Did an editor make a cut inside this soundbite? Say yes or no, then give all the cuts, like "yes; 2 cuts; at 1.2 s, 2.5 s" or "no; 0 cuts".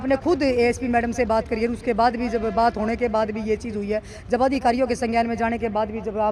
no; 0 cuts